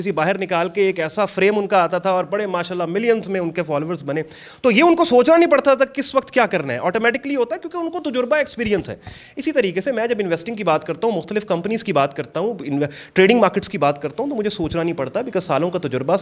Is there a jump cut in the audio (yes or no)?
no